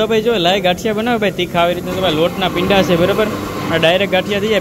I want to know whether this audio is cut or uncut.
uncut